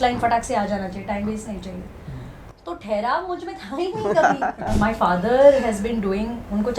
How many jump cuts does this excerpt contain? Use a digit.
1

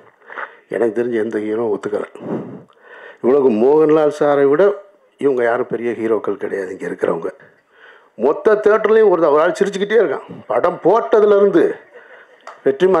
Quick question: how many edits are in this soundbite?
1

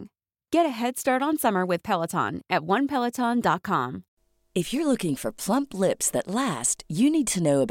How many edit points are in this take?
1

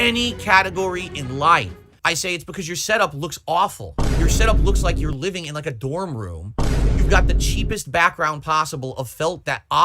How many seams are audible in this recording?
1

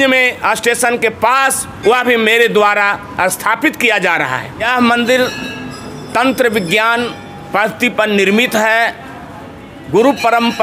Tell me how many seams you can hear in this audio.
1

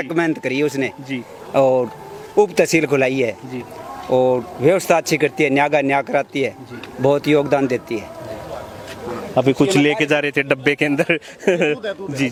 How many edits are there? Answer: 0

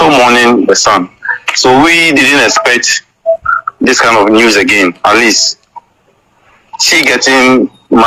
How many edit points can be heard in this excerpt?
0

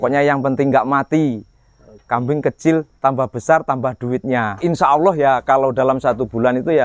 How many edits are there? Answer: 1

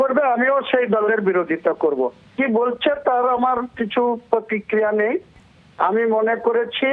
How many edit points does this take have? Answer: 1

